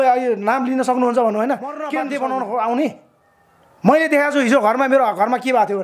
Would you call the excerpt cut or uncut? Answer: cut